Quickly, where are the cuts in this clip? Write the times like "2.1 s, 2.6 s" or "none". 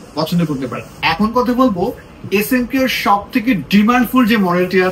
0.9 s

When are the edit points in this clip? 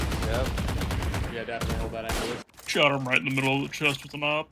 2.5 s

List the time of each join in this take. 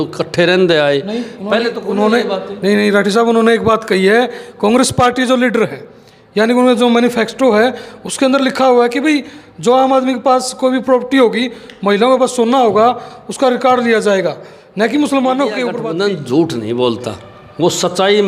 15.7 s

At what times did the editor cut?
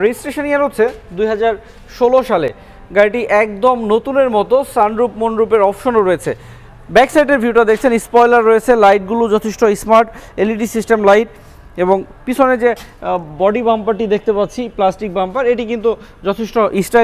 none

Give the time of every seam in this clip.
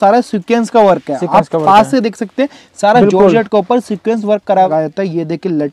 4.7 s

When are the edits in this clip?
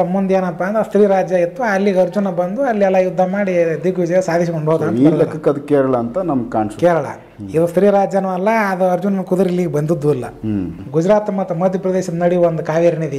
10.7 s

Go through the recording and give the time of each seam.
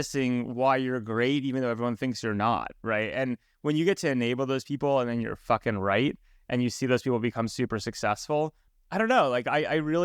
8.7 s

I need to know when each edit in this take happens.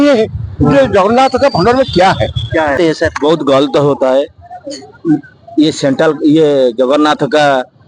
2.8 s

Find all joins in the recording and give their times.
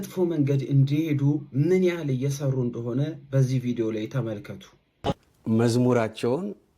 5.1 s

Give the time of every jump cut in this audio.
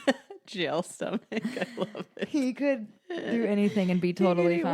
none

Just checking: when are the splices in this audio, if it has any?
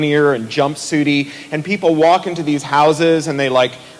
2.6 s

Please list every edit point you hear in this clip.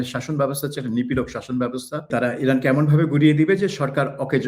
2.1 s

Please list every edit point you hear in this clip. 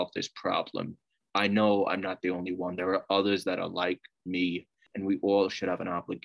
4.8 s

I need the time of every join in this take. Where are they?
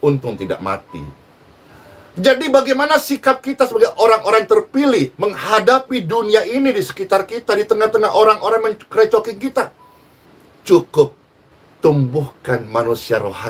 none

